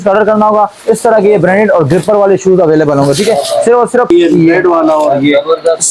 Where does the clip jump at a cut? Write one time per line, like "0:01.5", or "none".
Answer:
0:04.1